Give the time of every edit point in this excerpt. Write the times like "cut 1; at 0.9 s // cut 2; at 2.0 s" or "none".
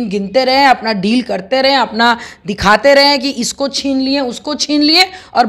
none